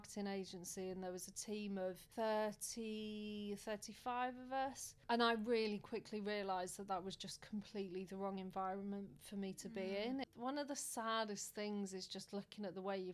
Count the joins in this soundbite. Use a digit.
3